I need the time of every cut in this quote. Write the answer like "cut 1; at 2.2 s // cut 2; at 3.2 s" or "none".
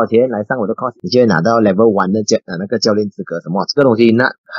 cut 1; at 0.9 s